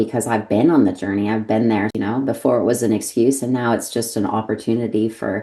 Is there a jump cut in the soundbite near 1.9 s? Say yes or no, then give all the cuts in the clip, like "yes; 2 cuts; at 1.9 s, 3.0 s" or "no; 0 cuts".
yes; 1 cut; at 1.9 s